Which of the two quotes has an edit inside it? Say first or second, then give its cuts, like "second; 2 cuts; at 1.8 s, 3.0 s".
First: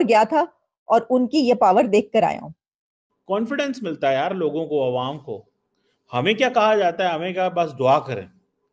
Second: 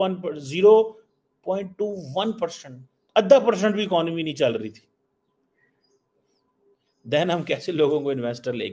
first; 1 cut; at 3.1 s